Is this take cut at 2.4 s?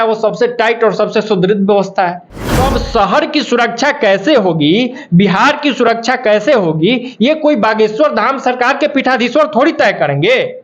yes; 1 cut; at 2.4 s

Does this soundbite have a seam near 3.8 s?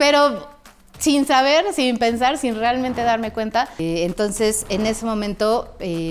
yes; 1 cut; at 3.8 s

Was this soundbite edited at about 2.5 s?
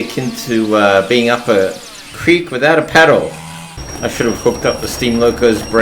no; 1 cut; at 3.9 s

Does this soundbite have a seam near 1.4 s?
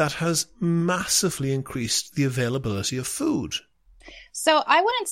no; 0 cuts

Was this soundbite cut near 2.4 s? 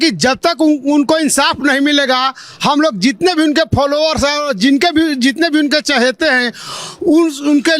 no; 0 cuts

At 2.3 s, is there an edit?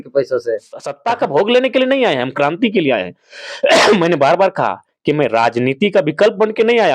no; 1 cut; at 0.9 s

